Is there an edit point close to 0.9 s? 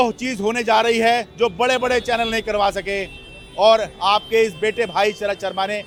no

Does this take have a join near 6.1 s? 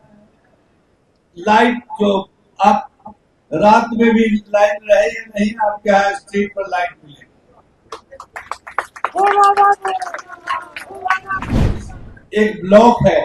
no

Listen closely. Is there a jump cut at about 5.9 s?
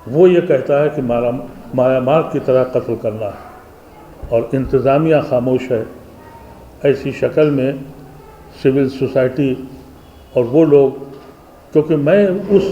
no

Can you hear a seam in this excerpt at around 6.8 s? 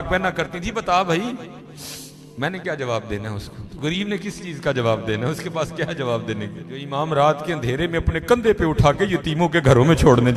yes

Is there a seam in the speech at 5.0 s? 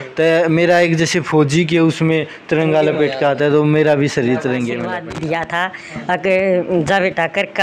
yes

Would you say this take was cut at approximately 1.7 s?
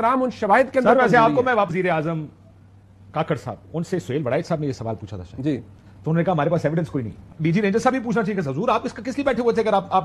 yes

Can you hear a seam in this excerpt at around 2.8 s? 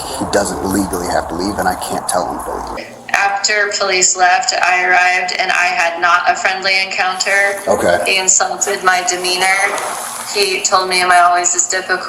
yes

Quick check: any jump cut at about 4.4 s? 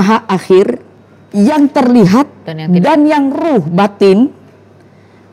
no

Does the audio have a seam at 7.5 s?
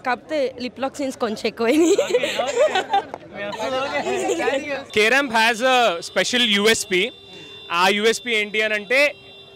no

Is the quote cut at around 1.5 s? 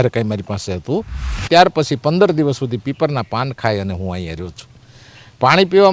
yes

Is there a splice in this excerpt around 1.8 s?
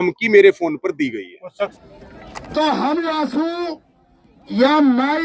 yes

